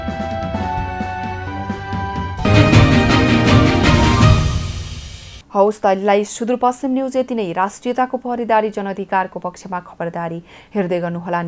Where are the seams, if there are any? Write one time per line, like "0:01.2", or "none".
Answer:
none